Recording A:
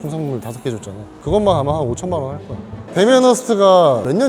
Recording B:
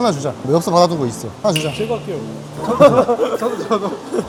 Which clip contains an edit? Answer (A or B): A